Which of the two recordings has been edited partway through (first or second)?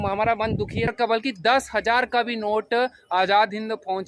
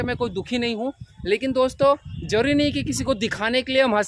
first